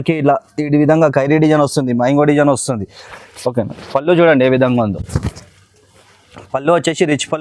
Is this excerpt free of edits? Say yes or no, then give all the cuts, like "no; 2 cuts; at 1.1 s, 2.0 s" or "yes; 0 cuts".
yes; 0 cuts